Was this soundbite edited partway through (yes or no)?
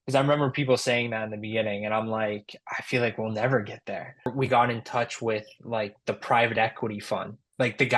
yes